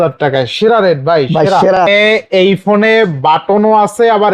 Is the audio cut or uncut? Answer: cut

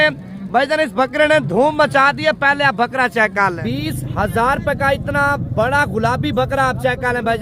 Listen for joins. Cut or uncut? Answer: cut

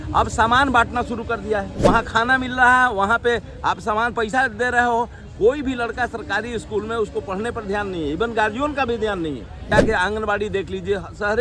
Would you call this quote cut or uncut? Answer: cut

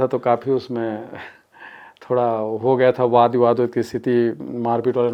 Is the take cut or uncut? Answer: uncut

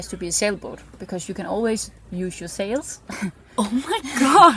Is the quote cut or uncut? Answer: uncut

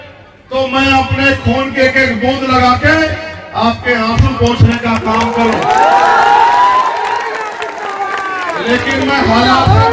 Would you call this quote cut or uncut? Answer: uncut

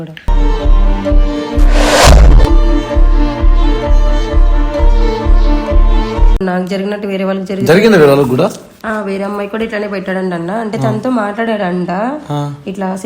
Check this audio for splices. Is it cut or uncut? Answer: cut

